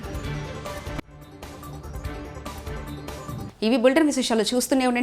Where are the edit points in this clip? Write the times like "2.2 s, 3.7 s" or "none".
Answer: none